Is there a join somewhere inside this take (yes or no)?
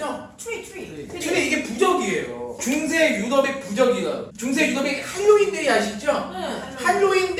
yes